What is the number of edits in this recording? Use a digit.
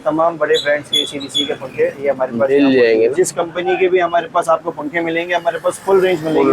1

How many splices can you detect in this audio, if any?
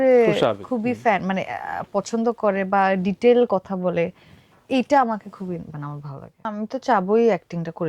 1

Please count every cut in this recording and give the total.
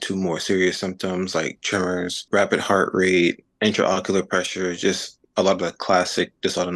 2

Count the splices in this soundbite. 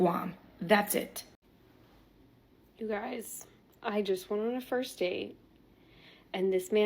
1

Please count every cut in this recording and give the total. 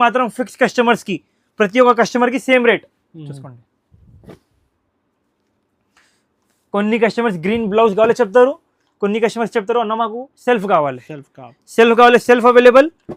0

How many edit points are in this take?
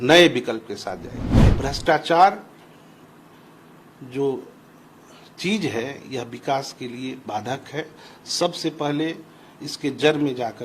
1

